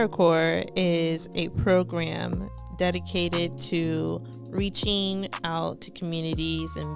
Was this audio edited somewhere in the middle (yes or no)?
no